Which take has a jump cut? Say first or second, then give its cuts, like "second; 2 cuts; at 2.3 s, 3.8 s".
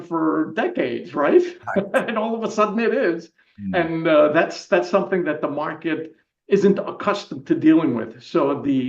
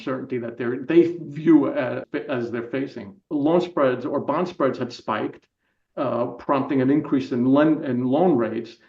second; 2 cuts; at 2.0 s, 3.3 s